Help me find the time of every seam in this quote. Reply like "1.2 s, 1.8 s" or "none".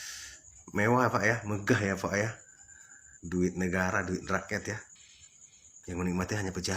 4.9 s